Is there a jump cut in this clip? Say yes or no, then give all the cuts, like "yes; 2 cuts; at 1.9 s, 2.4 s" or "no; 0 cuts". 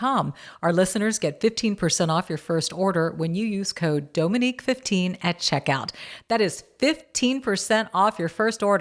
no; 0 cuts